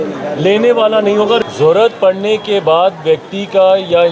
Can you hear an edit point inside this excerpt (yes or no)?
yes